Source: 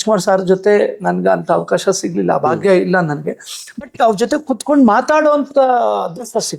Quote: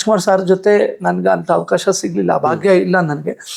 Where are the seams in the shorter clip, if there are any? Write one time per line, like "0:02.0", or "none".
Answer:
none